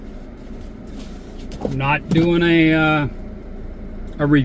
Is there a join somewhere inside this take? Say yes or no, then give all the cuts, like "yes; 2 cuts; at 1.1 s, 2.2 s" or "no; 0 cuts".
no; 0 cuts